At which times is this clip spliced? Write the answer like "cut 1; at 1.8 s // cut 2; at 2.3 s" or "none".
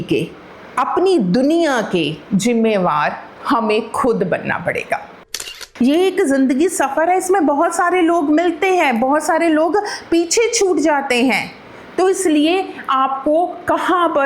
cut 1; at 5.2 s